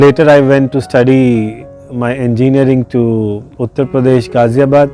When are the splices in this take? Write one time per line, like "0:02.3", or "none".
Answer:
none